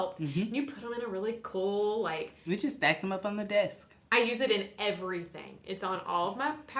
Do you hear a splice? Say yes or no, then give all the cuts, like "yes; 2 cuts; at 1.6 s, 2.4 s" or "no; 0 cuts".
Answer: no; 0 cuts